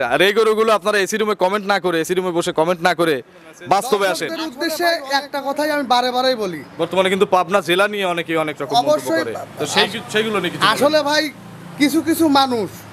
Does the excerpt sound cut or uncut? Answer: cut